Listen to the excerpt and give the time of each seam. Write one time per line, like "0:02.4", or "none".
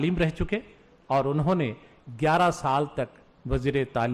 none